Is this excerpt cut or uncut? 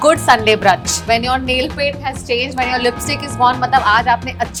uncut